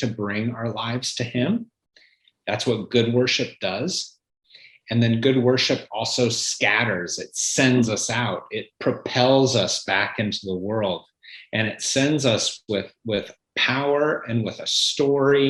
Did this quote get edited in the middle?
no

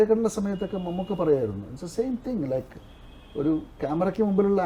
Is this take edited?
no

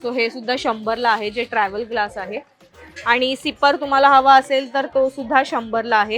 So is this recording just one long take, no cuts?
yes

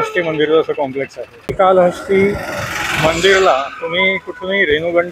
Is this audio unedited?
no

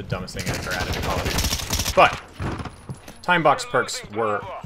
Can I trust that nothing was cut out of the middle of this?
no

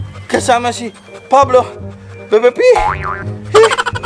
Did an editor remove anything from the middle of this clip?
no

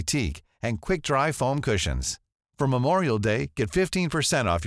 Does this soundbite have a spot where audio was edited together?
no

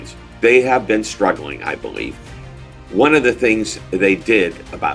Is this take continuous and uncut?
yes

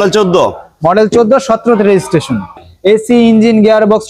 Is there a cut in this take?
yes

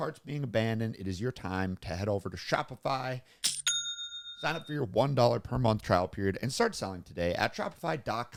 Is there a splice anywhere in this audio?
no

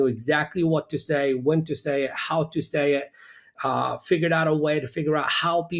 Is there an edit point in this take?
no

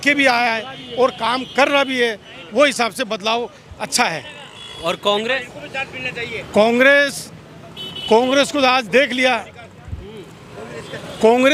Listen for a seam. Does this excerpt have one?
no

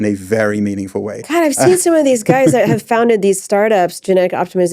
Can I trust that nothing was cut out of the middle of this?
no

